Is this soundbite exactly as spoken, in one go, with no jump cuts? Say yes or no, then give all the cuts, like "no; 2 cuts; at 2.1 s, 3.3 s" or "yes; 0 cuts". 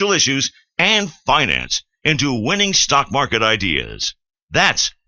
yes; 0 cuts